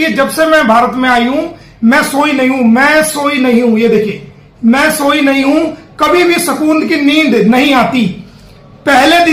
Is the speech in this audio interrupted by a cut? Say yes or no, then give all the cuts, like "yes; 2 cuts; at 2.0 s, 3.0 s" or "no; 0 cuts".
no; 0 cuts